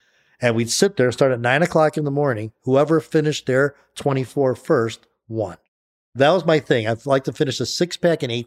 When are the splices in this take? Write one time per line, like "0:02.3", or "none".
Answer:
0:05.6